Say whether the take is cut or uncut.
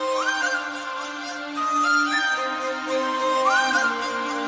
cut